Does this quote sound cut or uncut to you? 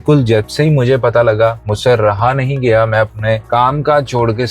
cut